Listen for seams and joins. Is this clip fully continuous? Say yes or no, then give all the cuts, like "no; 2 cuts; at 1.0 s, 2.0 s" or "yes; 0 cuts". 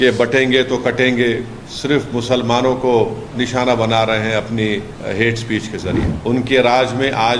no; 2 cuts; at 1.6 s, 6.1 s